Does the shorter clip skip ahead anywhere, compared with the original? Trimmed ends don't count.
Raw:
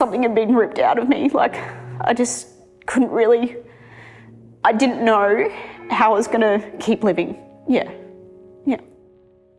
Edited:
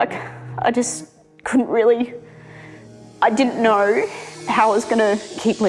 no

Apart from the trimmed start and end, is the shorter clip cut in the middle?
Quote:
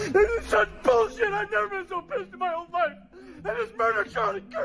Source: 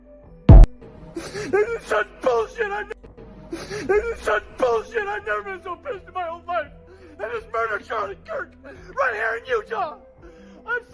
yes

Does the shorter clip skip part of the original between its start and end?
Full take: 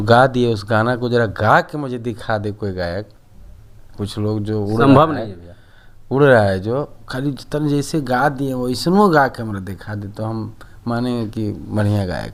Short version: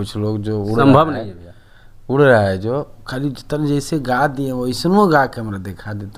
no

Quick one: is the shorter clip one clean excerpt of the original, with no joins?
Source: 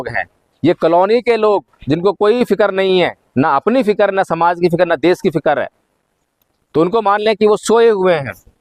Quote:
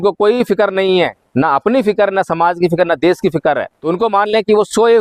no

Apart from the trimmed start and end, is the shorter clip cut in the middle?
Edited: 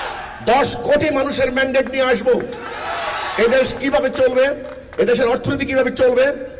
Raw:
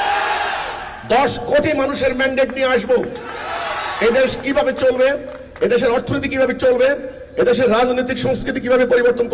no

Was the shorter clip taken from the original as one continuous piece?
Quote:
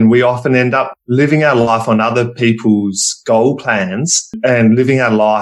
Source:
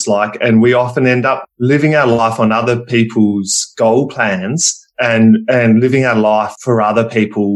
no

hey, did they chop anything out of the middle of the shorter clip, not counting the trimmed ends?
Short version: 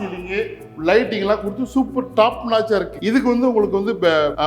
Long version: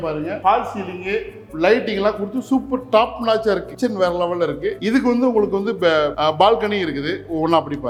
yes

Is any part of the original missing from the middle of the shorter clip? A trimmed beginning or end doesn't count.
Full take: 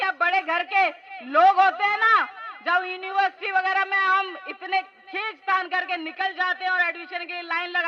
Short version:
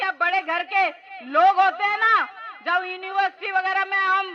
no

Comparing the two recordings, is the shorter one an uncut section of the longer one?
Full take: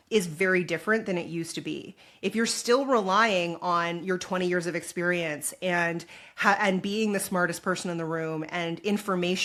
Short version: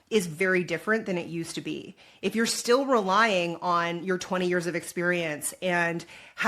yes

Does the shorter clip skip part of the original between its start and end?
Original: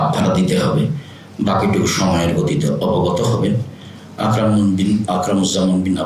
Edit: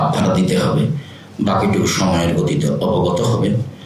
no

